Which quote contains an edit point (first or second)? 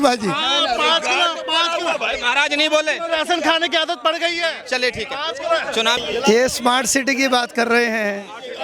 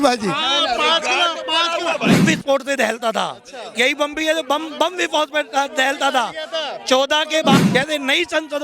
second